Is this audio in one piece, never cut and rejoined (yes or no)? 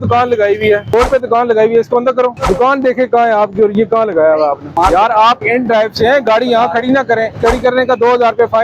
no